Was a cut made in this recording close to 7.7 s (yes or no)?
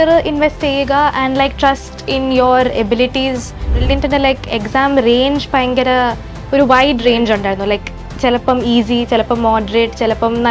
no